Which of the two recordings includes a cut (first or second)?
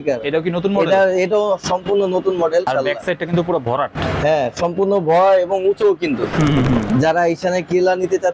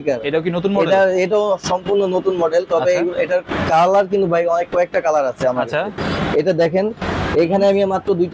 first